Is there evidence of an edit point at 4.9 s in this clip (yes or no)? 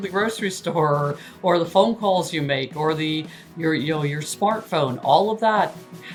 no